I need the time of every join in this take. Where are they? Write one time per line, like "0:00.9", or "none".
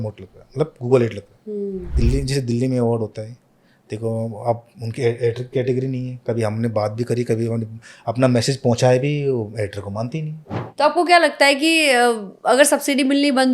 0:01.9
0:10.6